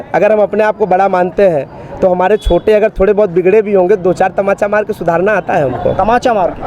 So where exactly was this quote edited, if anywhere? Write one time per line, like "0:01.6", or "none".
none